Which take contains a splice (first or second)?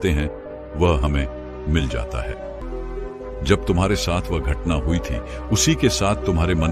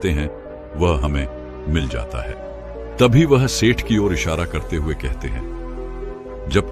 first